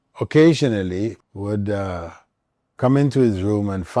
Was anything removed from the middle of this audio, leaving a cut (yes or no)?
yes